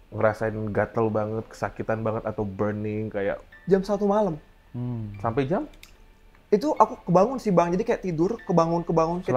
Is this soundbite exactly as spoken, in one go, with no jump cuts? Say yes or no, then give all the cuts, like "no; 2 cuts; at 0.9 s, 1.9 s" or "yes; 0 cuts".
yes; 0 cuts